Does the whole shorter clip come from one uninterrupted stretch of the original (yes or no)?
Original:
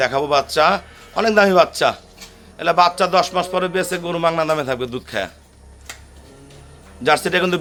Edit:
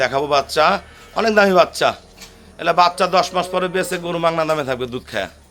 yes